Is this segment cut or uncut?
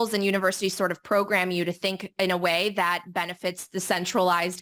uncut